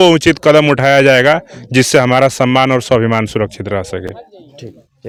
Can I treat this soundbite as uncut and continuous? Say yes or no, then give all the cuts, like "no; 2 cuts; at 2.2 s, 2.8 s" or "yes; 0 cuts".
yes; 0 cuts